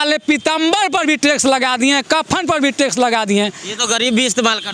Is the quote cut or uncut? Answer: uncut